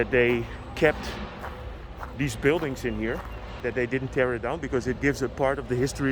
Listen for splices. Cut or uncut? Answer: cut